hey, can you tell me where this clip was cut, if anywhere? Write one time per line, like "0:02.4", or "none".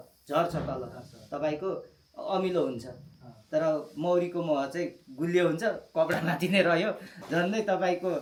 none